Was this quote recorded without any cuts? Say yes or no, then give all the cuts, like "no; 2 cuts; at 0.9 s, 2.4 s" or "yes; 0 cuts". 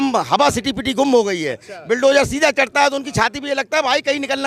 yes; 0 cuts